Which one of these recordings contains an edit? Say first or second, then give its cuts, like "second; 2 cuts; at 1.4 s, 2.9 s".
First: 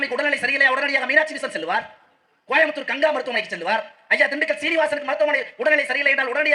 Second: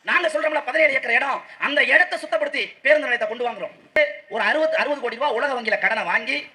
second; 1 cut; at 4.0 s